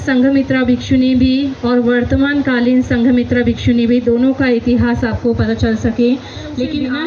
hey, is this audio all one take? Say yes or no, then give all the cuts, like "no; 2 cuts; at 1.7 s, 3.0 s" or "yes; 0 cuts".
yes; 0 cuts